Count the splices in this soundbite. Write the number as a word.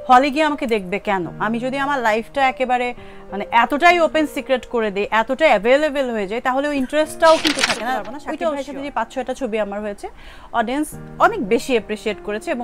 one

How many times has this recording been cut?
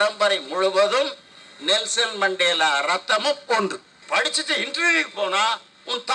one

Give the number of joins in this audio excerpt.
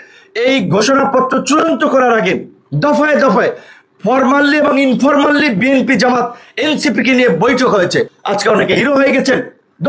one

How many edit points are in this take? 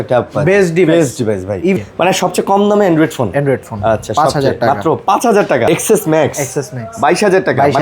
two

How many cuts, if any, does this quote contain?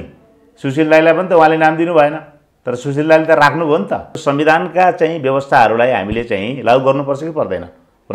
one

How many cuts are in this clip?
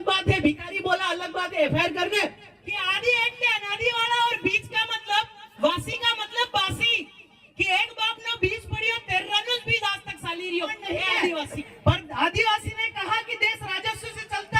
two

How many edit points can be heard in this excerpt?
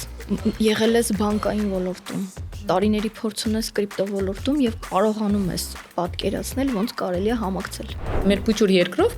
one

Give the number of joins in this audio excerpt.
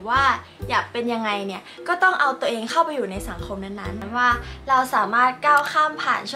one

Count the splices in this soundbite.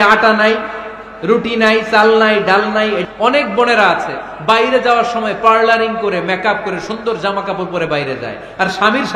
one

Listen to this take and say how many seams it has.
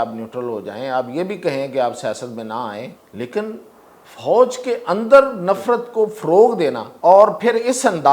two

